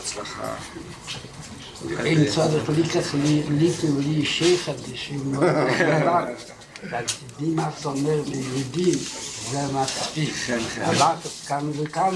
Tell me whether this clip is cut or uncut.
cut